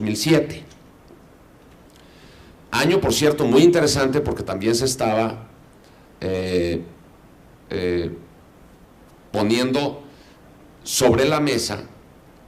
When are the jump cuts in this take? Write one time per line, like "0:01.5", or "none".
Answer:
none